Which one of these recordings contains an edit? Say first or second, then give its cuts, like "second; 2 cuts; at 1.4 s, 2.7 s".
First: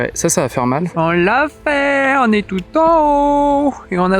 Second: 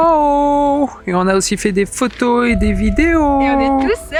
first; 1 cut; at 0.9 s